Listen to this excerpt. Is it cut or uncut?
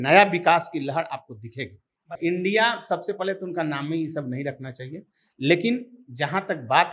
cut